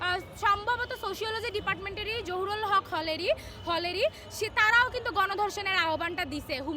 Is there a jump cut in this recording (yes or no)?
no